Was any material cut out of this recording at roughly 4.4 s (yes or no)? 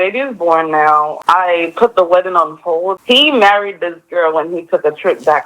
no